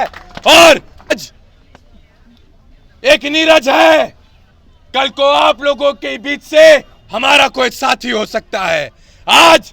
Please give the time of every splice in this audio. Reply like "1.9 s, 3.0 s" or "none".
1.2 s